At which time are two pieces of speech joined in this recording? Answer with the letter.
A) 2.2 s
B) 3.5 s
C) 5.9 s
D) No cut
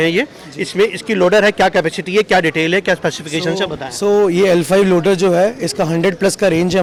D